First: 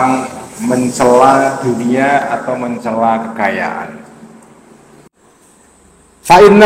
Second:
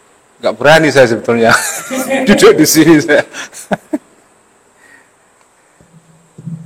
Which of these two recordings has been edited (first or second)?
first